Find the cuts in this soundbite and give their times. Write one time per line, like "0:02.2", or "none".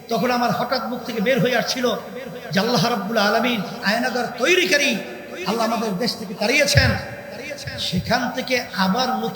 0:03.8

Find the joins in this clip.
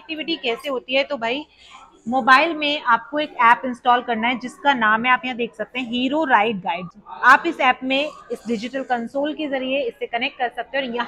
none

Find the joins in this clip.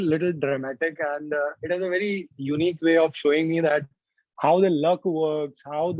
none

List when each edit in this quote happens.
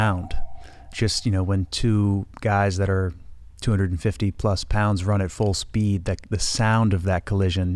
0:00.9

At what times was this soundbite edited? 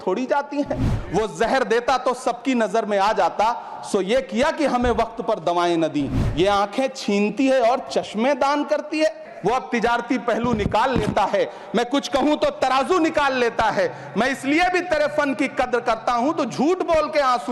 0:00.9
0:06.2
0:09.3

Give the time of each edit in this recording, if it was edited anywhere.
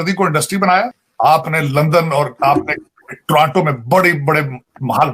0:01.0

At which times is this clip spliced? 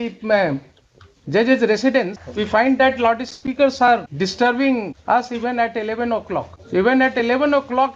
0:02.2
0:04.1
0:05.0
0:06.6

